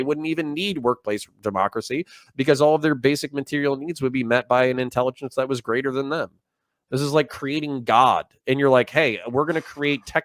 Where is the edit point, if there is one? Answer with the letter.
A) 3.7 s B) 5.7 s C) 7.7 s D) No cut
D